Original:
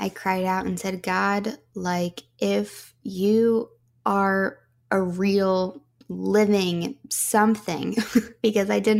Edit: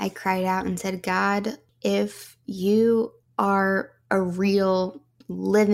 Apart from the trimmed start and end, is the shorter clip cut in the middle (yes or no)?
yes